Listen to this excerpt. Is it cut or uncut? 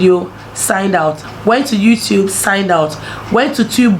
cut